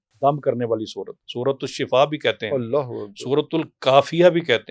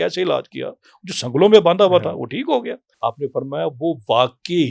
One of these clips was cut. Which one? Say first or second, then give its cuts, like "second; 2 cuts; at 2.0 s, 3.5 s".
second; 1 cut; at 2.8 s